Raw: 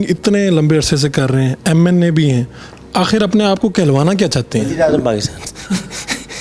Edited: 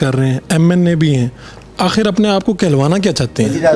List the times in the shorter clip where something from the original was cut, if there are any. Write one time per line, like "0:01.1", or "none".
none